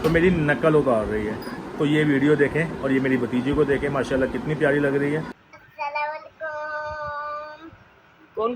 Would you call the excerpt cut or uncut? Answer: cut